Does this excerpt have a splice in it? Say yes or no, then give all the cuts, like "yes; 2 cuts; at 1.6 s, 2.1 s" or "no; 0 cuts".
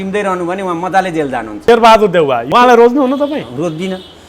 yes; 2 cuts; at 1.7 s, 2.4 s